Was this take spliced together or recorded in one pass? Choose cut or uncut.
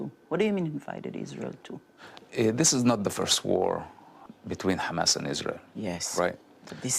cut